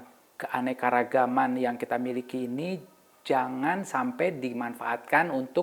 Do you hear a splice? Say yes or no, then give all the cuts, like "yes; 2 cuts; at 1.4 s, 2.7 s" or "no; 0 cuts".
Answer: no; 0 cuts